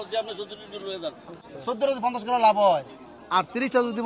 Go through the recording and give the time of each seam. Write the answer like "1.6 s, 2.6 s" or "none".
1.5 s